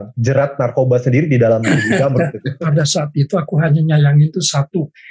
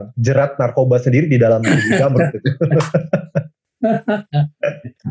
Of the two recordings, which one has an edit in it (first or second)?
first